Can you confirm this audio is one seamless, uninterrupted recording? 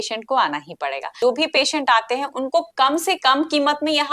no; 1 cut; at 1.2 s

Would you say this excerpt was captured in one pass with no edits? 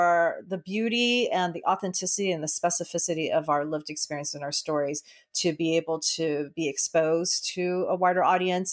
yes; 0 cuts

